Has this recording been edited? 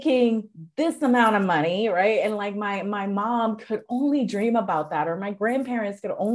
no; 0 cuts

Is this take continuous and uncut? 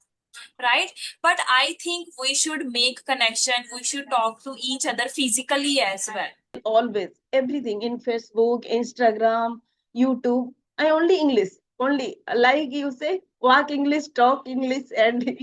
no; 1 cut; at 6.6 s

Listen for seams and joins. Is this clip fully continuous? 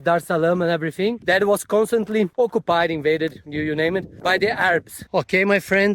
no; 1 cut; at 5.0 s

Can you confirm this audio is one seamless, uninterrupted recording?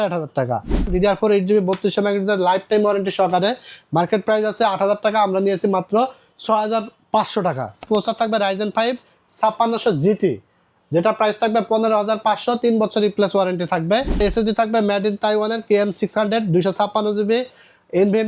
no; 3 cuts; at 0.9 s, 7.8 s, 14.2 s

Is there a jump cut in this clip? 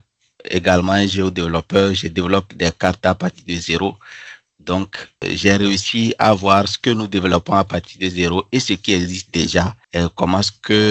yes; 1 cut; at 9.8 s

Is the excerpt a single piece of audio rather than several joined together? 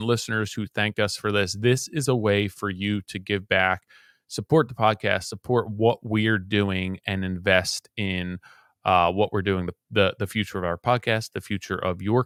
yes; 0 cuts

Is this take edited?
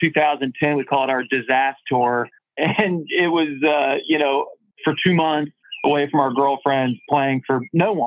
no; 0 cuts

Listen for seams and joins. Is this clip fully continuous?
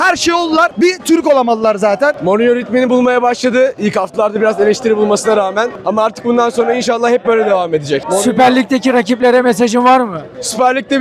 no; 2 cuts; at 2.2 s, 8.0 s

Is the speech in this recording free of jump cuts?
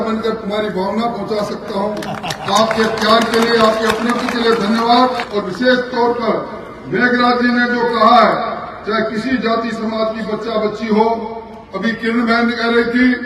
yes; 0 cuts

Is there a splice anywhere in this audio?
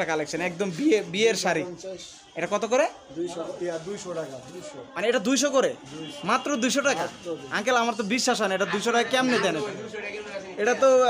no; 0 cuts

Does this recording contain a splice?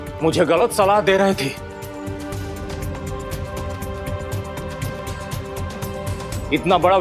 no; 0 cuts

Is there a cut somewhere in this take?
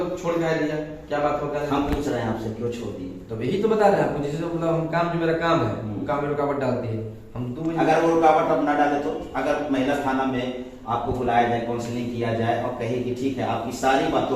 no; 0 cuts

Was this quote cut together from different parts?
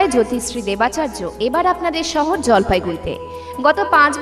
no; 0 cuts

